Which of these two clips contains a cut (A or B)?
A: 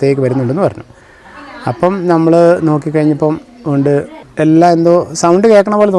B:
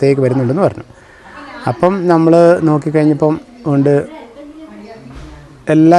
A